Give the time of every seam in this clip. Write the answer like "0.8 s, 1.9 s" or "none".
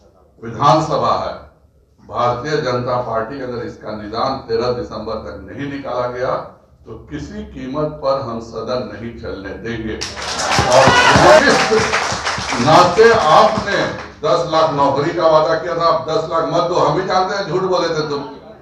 11.4 s